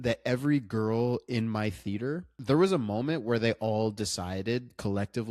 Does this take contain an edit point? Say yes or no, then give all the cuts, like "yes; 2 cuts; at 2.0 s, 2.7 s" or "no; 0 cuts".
yes; 1 cut; at 2.3 s